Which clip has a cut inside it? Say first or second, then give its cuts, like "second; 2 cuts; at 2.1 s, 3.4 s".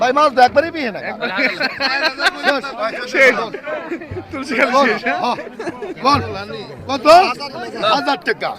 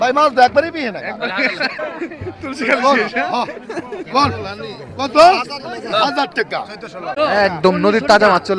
second; 2 cuts; at 1.7 s, 7.1 s